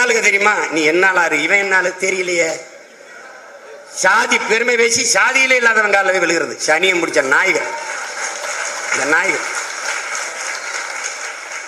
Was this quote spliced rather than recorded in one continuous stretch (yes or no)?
no